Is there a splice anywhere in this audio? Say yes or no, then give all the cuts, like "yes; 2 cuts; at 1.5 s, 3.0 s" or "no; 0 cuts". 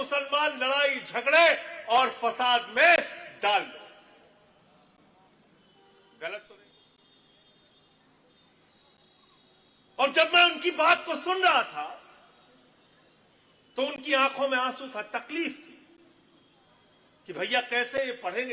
yes; 1 cut; at 6.4 s